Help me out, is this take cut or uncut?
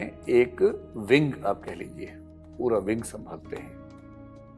cut